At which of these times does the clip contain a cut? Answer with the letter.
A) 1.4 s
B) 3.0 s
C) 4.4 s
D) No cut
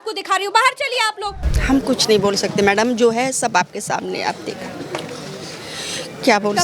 A